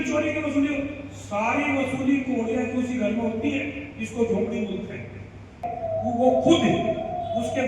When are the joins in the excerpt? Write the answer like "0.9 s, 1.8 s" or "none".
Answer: 5.7 s